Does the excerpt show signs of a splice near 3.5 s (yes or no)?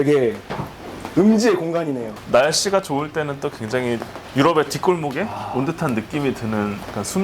no